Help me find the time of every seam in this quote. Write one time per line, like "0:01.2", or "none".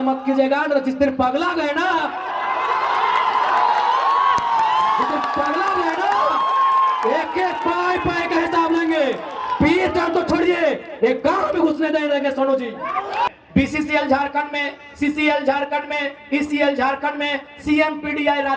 0:13.3